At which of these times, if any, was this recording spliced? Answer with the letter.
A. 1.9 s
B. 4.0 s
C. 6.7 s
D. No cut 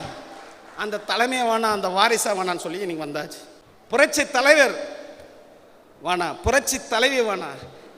B